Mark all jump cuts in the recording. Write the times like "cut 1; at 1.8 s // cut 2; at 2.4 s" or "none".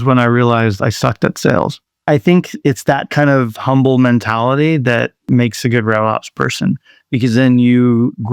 cut 1; at 2.6 s